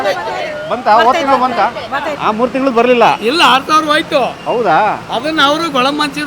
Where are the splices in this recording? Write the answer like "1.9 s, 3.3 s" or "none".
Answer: 2.2 s